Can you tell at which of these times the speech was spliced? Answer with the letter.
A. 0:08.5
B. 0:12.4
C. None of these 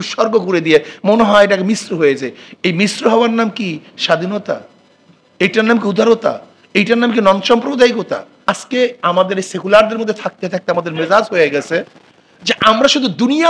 A